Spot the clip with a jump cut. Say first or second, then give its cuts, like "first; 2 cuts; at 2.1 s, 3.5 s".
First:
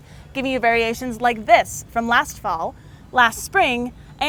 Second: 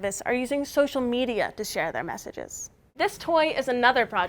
second; 1 cut; at 2.9 s